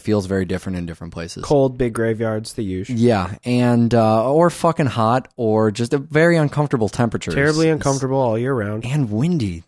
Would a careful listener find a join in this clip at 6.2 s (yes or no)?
yes